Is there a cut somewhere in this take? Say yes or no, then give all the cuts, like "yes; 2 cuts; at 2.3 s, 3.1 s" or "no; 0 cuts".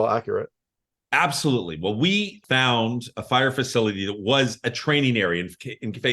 yes; 1 cut; at 2.4 s